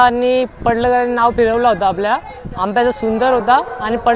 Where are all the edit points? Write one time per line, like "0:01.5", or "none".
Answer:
none